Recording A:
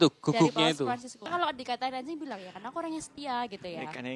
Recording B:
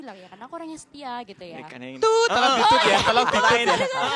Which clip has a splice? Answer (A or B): A